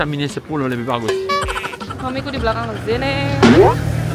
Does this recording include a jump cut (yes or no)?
yes